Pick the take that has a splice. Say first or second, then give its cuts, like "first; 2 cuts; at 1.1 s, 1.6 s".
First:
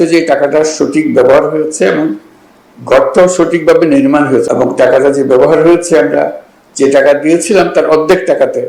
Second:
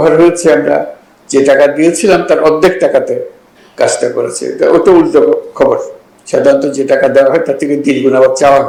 first; 1 cut; at 4.5 s